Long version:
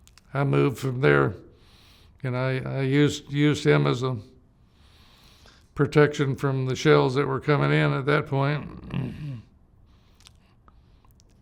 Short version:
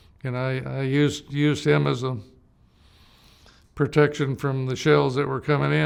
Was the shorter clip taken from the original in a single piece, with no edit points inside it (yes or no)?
yes